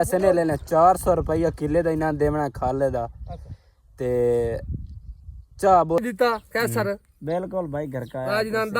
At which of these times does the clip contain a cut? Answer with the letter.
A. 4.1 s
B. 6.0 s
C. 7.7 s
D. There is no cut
B